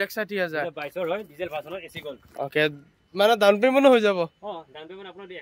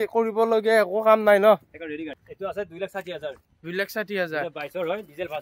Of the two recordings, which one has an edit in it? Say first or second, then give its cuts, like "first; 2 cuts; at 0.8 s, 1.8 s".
second; 1 cut; at 2.2 s